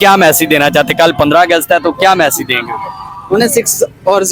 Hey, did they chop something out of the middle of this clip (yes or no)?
no